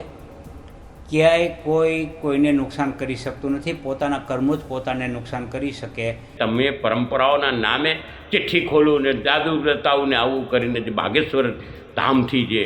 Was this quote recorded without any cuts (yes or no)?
no